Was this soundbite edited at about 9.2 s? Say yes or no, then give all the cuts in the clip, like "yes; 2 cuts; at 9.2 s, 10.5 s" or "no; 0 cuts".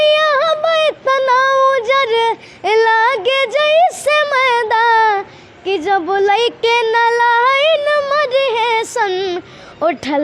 no; 0 cuts